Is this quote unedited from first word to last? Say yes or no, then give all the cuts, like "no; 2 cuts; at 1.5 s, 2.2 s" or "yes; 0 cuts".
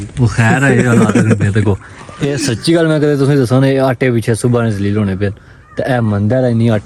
yes; 0 cuts